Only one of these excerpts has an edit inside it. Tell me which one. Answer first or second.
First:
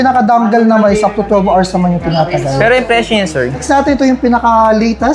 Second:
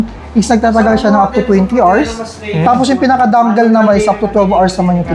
first